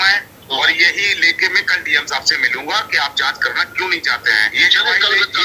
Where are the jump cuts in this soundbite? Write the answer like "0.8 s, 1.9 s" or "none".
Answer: 4.5 s